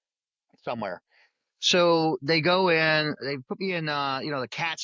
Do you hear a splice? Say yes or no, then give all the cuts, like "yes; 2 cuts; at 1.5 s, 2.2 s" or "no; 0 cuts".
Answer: no; 0 cuts